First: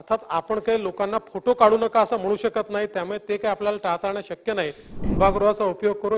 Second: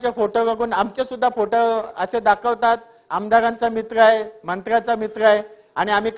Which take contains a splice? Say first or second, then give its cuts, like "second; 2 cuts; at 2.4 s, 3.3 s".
first; 1 cut; at 5.2 s